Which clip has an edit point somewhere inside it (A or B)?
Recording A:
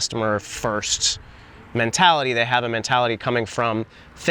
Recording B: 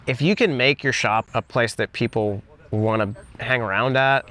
B